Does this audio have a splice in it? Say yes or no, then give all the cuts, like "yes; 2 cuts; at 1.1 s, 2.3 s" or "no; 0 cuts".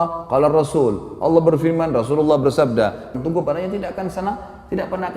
yes; 1 cut; at 3.1 s